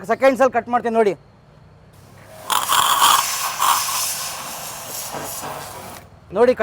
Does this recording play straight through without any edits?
yes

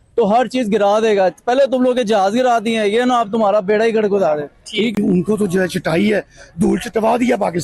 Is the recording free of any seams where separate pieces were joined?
no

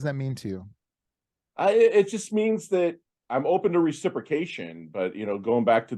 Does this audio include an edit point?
no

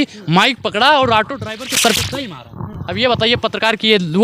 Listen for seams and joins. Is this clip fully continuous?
yes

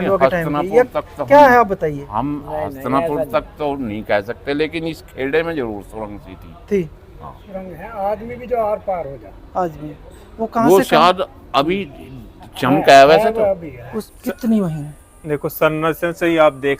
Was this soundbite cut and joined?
yes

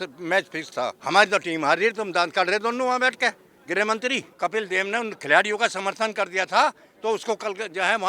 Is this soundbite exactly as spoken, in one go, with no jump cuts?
no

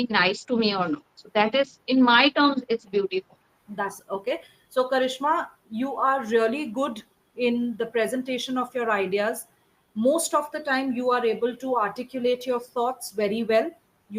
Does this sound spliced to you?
yes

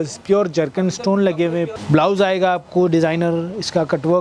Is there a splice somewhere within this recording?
yes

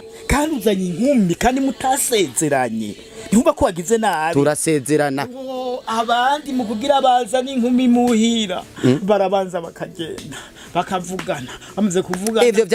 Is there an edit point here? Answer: no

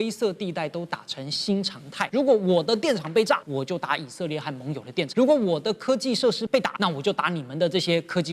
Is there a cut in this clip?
yes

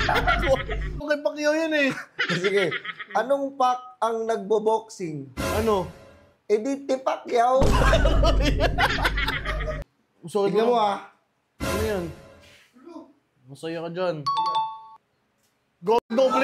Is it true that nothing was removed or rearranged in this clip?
no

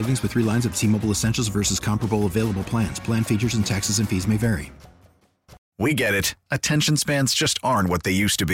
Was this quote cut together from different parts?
yes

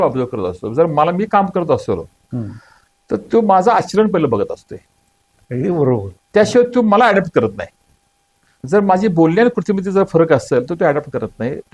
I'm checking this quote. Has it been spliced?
no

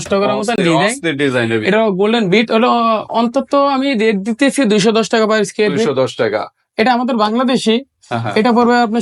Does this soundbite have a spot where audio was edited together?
no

